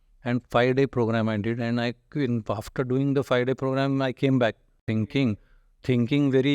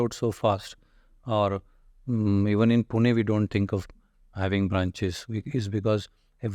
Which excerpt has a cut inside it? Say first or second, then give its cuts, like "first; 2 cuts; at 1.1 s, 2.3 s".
first; 1 cut; at 4.8 s